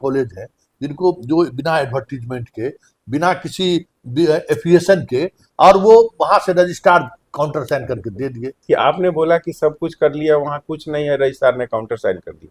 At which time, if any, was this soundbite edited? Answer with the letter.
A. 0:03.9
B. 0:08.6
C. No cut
B